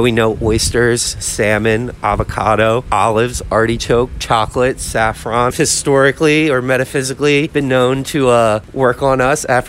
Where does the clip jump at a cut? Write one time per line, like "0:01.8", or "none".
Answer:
0:05.5
0:07.5